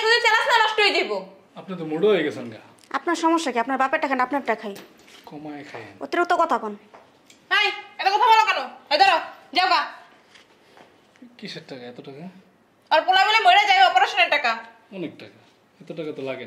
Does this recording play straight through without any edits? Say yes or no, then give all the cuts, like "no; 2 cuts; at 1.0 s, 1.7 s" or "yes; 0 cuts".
yes; 0 cuts